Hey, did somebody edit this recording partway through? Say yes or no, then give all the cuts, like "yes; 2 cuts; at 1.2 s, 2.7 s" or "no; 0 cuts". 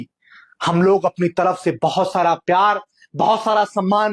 no; 0 cuts